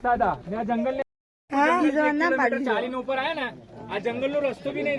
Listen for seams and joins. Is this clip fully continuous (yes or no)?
no